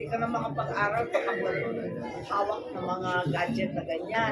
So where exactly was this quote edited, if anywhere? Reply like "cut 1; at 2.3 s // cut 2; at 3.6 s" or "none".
none

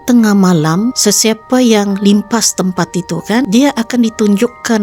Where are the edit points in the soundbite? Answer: cut 1; at 1.0 s // cut 2; at 3.5 s

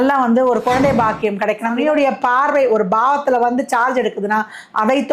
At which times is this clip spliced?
cut 1; at 1.8 s

